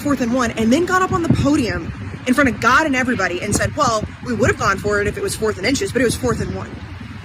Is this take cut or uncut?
uncut